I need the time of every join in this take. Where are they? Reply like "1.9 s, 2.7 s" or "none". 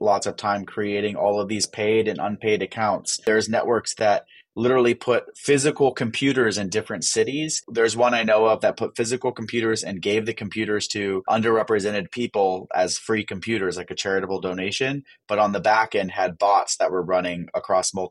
3.2 s, 7.6 s, 11.3 s